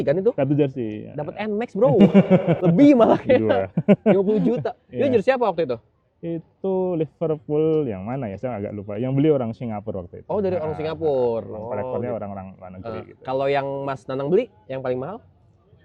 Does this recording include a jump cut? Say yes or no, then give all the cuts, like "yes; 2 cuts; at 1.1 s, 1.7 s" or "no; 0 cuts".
no; 0 cuts